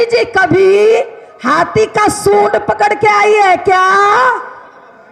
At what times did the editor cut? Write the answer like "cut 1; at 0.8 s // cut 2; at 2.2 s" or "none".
none